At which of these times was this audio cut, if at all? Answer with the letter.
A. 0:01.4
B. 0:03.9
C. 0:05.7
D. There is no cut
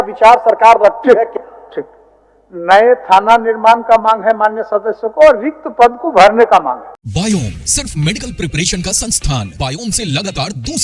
D